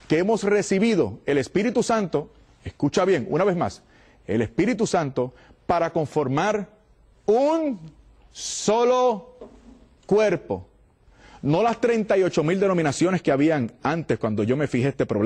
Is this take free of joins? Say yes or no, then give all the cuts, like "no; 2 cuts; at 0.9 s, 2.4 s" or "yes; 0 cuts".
yes; 0 cuts